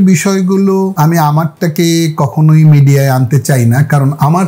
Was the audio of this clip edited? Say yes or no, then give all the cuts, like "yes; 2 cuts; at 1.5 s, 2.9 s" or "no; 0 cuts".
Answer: yes; 1 cut; at 0.9 s